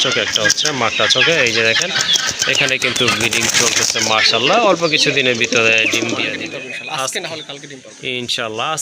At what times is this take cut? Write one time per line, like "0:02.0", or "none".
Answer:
0:06.3